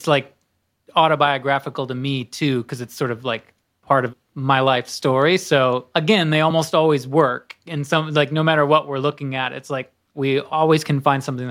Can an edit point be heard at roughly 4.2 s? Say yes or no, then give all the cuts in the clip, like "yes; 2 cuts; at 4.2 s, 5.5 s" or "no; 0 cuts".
yes; 2 cuts; at 4.2 s, 5.8 s